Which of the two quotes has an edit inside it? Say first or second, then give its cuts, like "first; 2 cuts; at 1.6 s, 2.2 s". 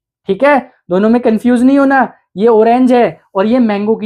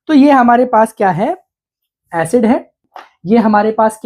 second; 1 cut; at 2.8 s